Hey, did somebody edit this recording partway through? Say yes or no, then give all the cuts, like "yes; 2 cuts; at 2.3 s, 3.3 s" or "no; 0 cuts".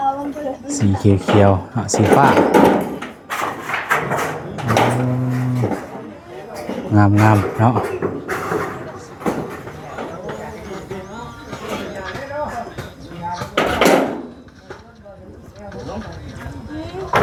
no; 0 cuts